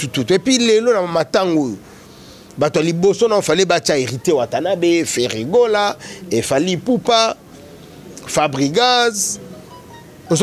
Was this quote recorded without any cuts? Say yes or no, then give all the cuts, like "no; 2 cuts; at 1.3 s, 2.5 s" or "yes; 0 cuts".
yes; 0 cuts